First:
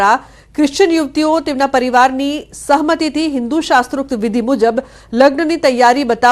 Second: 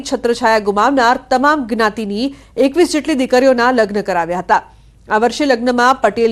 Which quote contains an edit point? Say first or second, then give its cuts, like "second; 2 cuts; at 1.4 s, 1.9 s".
first; 1 cut; at 3.5 s